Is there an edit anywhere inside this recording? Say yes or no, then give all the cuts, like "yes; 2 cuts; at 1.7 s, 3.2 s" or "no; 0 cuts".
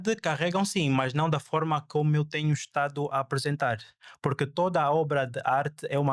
no; 0 cuts